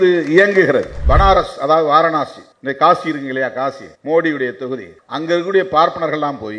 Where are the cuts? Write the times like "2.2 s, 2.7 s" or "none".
1.0 s